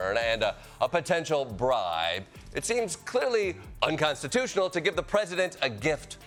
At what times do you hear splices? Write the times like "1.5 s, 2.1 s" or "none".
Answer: none